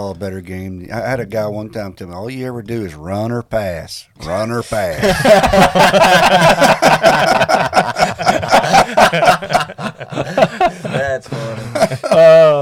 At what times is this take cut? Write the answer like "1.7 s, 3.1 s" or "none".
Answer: none